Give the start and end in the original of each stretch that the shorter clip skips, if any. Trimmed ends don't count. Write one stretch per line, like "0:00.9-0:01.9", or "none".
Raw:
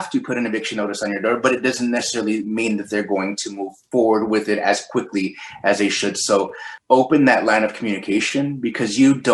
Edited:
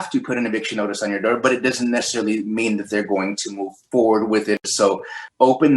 0:04.6-0:06.1